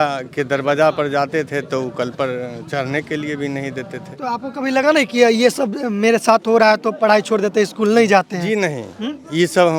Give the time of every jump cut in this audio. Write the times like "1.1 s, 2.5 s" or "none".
none

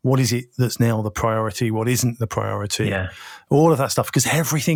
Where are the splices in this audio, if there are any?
none

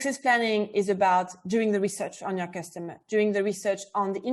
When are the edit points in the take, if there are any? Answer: none

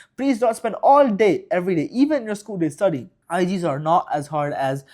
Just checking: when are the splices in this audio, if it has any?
3.1 s

